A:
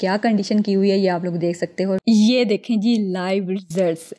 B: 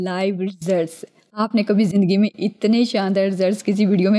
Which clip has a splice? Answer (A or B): A